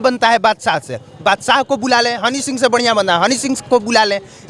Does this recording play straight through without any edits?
yes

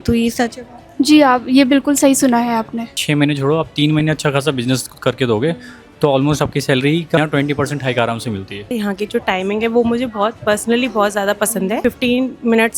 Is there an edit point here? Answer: yes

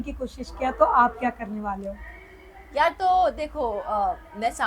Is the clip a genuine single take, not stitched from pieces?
yes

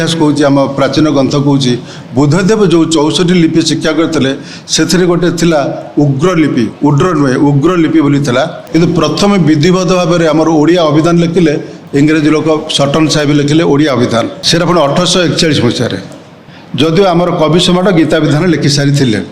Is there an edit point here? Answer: yes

